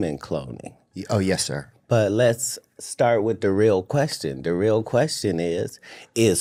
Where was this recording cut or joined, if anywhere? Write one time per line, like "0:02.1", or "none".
none